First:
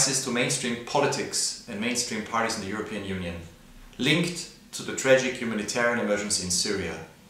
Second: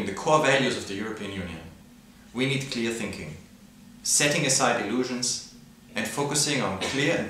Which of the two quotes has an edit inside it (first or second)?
second